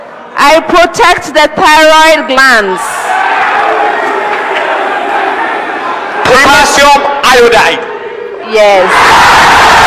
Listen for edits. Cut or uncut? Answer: uncut